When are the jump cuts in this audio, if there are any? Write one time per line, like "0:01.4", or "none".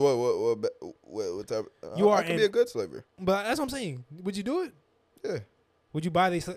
0:03.0

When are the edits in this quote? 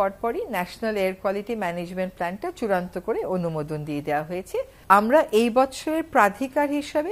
0:04.7

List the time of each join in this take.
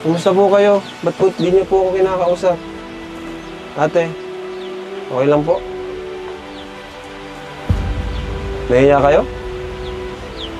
none

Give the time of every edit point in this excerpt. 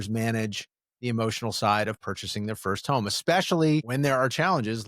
0:03.9

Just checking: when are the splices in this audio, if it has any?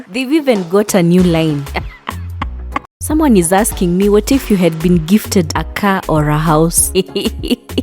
0:03.0

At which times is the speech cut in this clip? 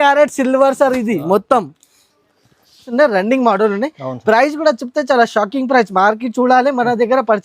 0:02.9

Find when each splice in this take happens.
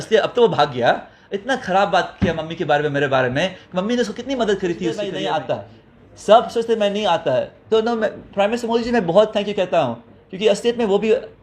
0:05.0

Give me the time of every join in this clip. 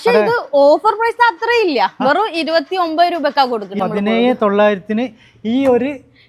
0:03.7

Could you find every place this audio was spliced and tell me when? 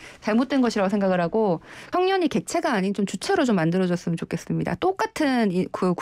0:01.8

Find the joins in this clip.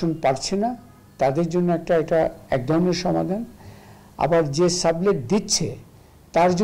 none

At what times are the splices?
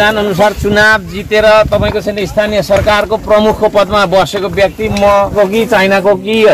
0:05.3

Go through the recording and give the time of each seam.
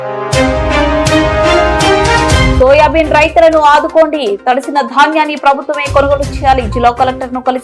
none

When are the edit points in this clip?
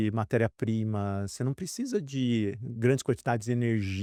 none

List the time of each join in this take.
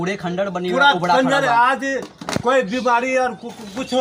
none

